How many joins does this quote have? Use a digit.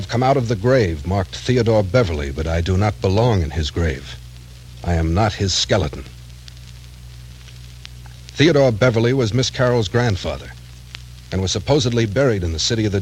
1